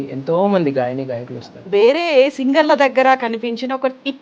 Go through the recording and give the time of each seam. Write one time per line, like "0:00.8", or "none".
0:01.6